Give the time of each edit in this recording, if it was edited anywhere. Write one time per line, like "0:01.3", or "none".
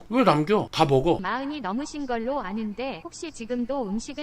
0:01.2